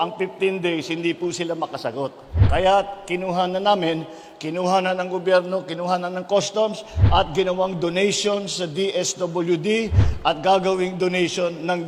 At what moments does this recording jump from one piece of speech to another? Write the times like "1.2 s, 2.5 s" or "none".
none